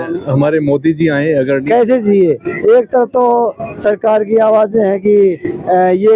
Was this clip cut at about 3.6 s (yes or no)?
no